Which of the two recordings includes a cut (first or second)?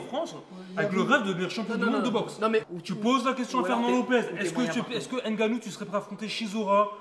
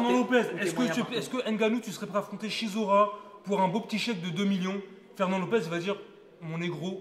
first